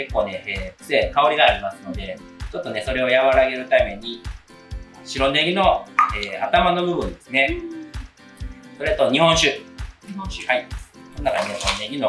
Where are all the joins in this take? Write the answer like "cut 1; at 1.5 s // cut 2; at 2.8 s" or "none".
none